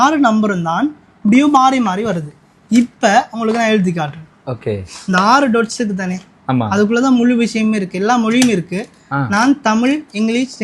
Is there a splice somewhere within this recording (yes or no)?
no